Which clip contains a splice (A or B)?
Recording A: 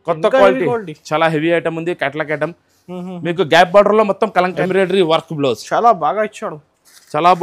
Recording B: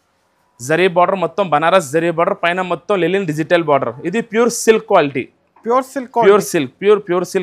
A